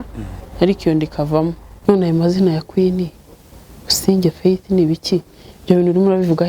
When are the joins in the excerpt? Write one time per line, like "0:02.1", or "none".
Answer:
0:01.7